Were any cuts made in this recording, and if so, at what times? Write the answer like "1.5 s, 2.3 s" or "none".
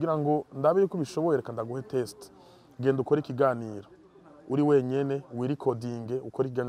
none